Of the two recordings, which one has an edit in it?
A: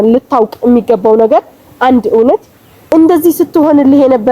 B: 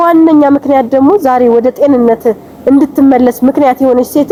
A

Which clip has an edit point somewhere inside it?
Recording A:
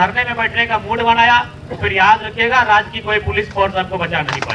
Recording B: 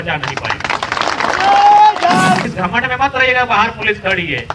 B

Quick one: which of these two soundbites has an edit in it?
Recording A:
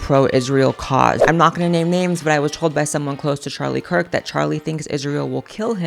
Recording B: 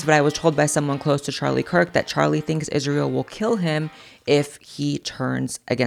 A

